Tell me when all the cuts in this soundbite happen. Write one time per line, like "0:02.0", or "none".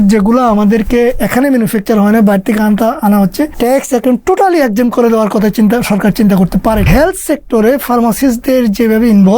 0:03.5
0:06.9